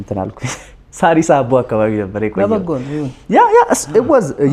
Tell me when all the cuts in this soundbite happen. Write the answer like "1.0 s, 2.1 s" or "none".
none